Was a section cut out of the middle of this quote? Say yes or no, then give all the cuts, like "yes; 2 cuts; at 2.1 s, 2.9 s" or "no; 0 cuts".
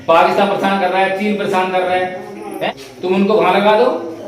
yes; 1 cut; at 2.5 s